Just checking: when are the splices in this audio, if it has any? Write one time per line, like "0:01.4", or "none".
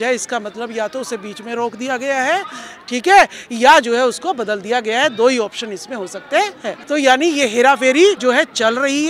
0:06.8
0:08.2